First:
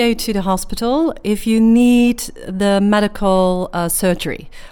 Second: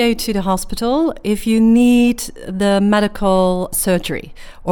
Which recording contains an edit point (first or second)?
second